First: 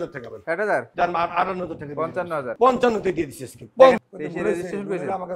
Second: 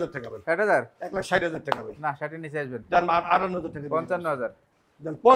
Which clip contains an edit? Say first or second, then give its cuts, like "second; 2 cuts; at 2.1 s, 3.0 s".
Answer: first; 3 cuts; at 0.9 s, 2.5 s, 4.0 s